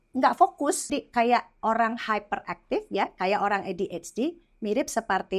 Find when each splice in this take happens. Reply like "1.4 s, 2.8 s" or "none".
1.0 s